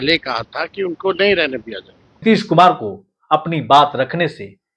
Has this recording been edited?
yes; 1 cut; at 2.2 s

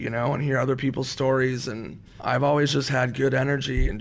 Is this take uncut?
no; 1 cut; at 2.1 s

